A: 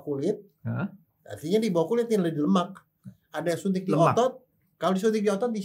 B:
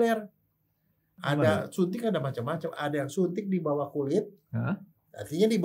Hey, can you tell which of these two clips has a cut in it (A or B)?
B